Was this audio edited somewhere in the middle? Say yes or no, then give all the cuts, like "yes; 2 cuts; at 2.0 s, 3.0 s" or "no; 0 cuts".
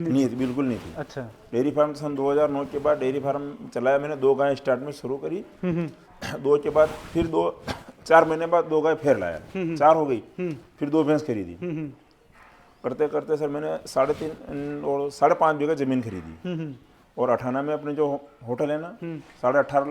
no; 0 cuts